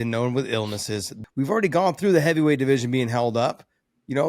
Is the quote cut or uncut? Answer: cut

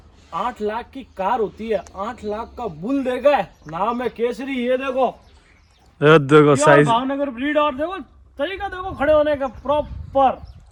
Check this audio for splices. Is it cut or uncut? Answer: uncut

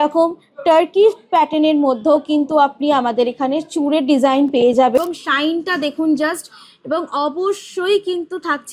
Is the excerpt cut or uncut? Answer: cut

